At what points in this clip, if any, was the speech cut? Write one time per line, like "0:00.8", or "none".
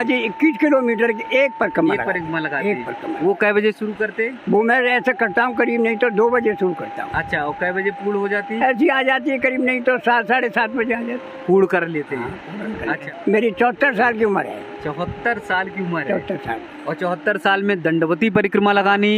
0:13.1